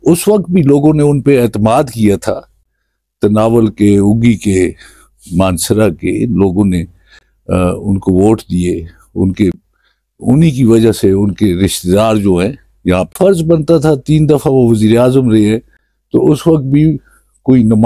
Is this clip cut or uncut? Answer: cut